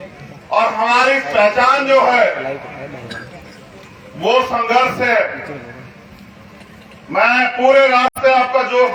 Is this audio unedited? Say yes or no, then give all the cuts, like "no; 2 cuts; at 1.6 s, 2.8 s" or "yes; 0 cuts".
yes; 0 cuts